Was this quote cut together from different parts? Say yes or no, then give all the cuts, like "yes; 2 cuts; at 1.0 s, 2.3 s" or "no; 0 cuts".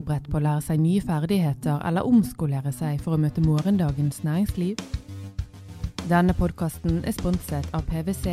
no; 0 cuts